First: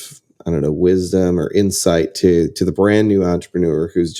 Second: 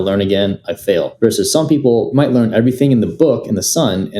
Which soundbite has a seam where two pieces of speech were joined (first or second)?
second